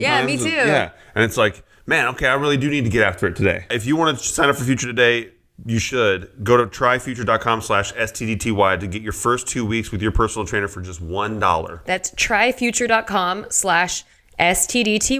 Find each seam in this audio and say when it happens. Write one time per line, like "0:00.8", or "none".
0:03.8